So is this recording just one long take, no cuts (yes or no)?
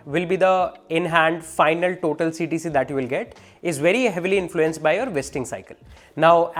yes